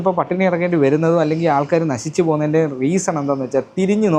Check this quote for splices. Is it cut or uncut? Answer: uncut